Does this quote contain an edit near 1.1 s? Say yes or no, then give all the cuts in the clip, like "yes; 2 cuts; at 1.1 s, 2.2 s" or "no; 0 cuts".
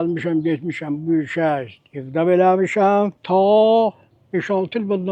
no; 2 cuts; at 3.2 s, 4.1 s